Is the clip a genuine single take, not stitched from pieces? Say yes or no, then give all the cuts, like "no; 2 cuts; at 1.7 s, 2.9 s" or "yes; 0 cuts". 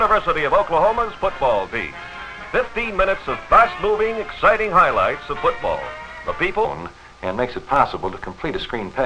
yes; 0 cuts